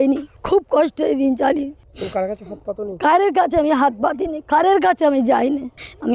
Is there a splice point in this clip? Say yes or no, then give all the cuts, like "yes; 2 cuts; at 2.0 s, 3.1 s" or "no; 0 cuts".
no; 0 cuts